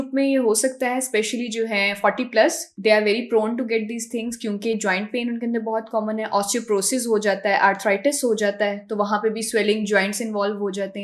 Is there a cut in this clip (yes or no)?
no